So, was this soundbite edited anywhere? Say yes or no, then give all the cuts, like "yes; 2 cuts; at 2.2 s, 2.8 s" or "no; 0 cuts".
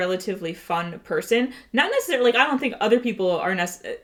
no; 0 cuts